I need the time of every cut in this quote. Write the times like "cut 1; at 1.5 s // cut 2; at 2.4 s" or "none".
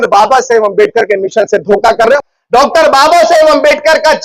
cut 1; at 2.2 s